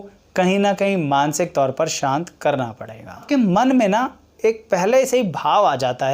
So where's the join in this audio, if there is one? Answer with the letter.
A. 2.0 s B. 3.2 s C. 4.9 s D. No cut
B